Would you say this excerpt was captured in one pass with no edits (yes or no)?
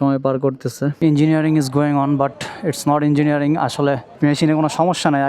no